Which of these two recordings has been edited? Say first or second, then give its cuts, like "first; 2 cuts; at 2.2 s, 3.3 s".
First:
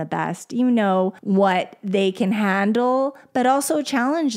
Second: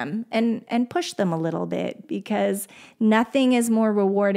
first; 1 cut; at 1.2 s